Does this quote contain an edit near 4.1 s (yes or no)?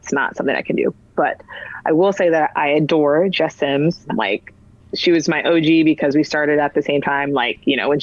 yes